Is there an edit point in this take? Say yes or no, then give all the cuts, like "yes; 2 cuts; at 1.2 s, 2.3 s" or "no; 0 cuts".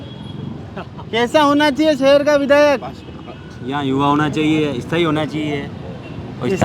no; 0 cuts